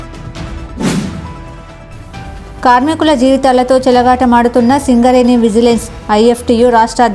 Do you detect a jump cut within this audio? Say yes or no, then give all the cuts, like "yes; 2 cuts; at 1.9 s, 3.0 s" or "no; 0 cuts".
yes; 1 cut; at 0.9 s